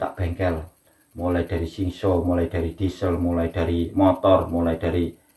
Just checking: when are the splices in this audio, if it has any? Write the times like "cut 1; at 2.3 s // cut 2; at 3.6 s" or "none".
none